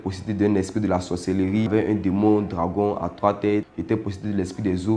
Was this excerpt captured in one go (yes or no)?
no